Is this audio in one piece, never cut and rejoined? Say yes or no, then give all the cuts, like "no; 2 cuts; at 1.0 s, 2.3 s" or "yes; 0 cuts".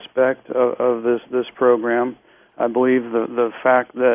yes; 0 cuts